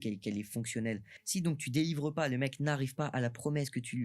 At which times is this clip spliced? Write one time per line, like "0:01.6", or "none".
0:01.1